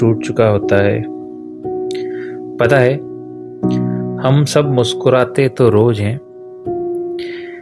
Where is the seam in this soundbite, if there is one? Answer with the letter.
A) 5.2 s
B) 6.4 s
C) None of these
B